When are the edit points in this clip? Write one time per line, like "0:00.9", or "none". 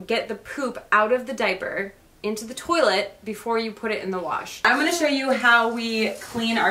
0:04.6

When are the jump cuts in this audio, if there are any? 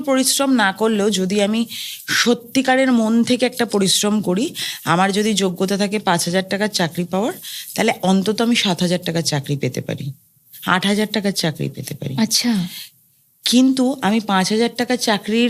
none

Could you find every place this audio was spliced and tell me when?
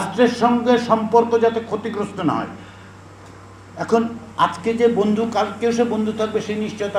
none

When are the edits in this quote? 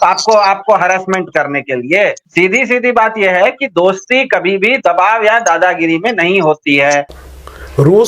0:07.1

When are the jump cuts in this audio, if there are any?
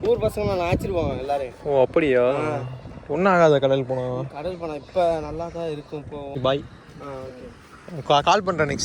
0:06.2

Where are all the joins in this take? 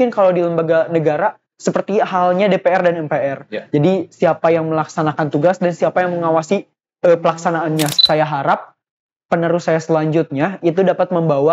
0:08.0

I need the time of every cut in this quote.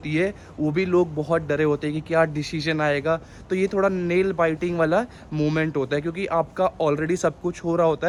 none

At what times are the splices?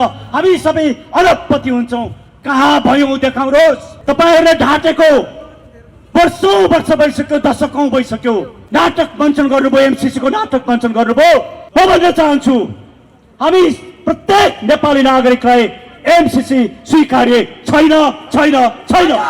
0:03.9
0:08.6
0:11.6

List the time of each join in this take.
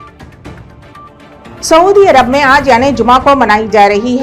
0:01.7

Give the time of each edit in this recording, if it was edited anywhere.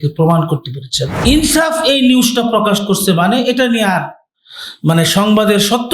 0:01.2

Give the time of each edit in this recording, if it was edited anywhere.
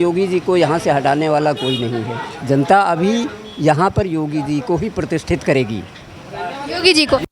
0:02.3

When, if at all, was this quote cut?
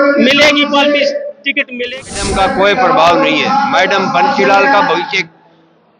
0:02.0

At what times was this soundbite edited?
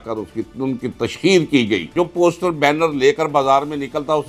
0:01.9

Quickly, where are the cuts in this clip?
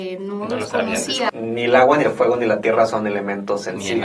0:01.2

